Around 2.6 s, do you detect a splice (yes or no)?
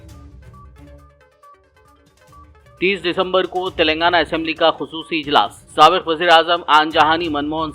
no